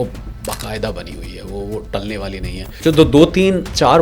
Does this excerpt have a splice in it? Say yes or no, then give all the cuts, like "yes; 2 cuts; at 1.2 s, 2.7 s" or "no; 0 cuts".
yes; 1 cut; at 2.7 s